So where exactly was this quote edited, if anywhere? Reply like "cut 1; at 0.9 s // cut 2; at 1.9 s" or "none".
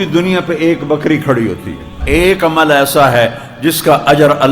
cut 1; at 2.0 s